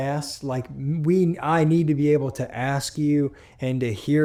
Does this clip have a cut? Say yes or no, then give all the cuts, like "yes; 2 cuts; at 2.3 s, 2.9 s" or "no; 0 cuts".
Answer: no; 0 cuts